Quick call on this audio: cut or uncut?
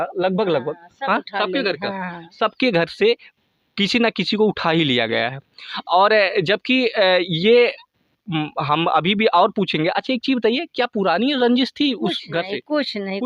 uncut